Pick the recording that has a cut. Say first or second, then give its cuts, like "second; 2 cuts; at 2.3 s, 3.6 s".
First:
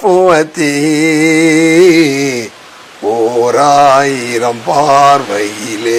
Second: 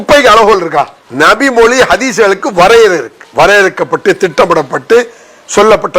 second; 2 cuts; at 1.0 s, 3.2 s